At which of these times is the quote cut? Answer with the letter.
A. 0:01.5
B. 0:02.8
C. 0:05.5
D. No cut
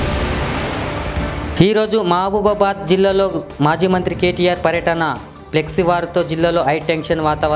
A